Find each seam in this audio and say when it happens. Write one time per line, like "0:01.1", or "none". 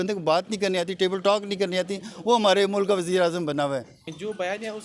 0:03.9